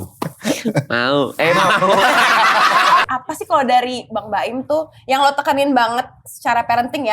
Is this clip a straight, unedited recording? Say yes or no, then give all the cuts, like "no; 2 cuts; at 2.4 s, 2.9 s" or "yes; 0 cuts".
no; 1 cut; at 3.0 s